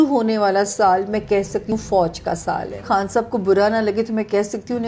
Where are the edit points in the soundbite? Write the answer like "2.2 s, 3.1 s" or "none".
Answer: 1.7 s, 2.8 s